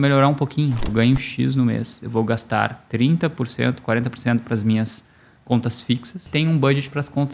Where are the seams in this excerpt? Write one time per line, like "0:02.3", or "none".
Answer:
0:00.9
0:06.2